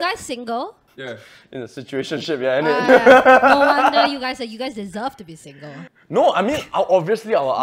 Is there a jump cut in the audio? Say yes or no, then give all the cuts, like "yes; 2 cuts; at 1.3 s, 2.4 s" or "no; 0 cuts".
yes; 2 cuts; at 0.9 s, 5.9 s